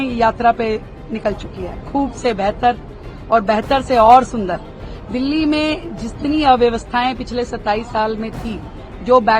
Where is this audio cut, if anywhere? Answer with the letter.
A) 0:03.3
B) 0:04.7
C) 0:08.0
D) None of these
D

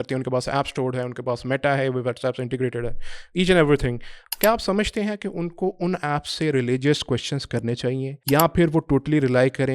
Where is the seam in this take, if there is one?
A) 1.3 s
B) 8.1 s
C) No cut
B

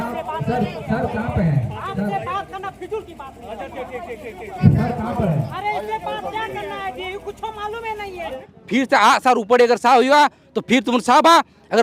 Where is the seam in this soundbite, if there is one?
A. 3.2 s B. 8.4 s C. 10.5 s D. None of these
B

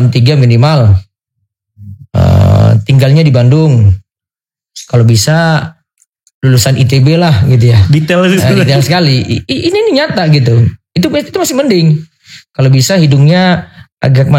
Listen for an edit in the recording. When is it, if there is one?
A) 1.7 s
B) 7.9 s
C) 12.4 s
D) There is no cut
D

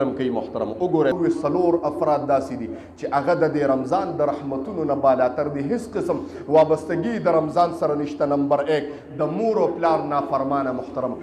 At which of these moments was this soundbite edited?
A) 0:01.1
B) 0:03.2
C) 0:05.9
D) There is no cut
A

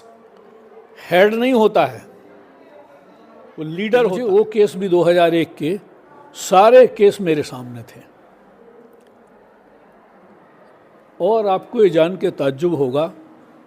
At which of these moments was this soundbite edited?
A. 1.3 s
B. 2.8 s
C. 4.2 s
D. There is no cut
C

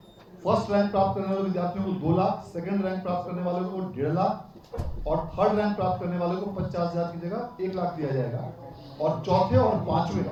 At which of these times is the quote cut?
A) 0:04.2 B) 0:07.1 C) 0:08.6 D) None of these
D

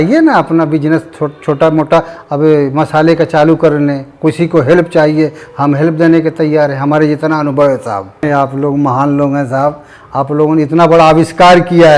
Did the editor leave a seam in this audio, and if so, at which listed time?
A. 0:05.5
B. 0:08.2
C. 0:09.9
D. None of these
B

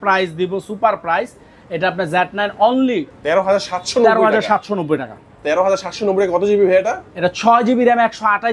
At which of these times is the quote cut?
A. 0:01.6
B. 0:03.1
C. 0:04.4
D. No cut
B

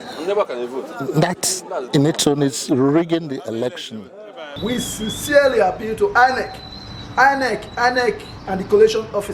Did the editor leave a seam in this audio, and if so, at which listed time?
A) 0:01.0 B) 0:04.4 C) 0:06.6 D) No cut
B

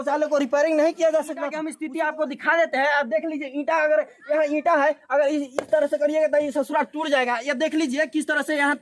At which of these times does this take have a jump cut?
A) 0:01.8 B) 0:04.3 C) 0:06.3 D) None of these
A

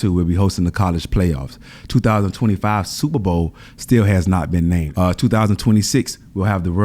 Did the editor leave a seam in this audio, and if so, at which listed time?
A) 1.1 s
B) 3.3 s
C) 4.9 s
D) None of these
C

